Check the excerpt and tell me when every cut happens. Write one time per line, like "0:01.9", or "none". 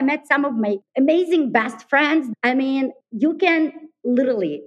0:00.9
0:02.3
0:03.0